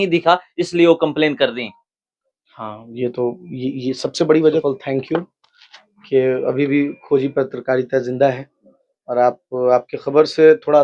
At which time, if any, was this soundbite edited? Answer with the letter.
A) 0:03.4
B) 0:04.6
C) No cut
B